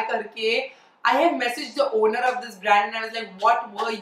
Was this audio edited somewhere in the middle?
no; 0 cuts

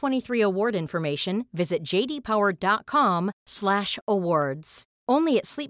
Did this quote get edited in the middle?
no; 0 cuts

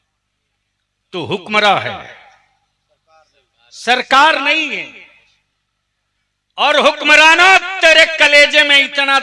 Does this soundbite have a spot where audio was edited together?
no; 0 cuts

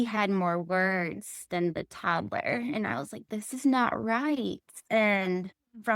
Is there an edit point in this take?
yes; 1 cut; at 4.7 s

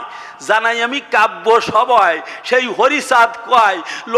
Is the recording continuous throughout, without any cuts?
yes; 0 cuts

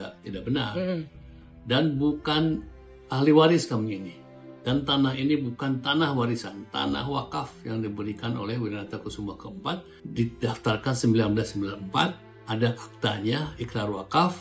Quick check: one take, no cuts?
no; 2 cuts; at 10.0 s, 12.3 s

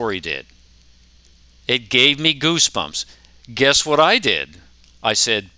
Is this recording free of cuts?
yes; 0 cuts

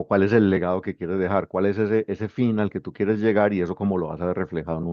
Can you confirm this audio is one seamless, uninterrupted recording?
yes; 0 cuts

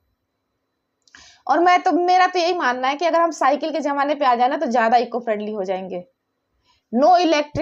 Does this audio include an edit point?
no; 0 cuts

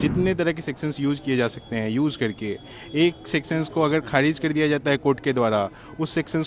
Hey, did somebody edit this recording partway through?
no; 0 cuts

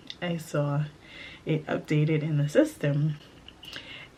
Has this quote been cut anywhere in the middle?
no; 0 cuts

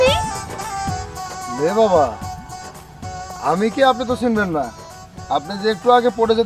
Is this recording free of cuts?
yes; 0 cuts

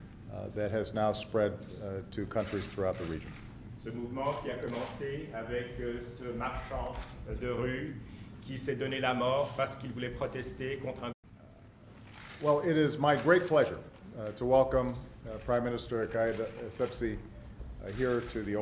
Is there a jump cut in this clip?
no; 0 cuts

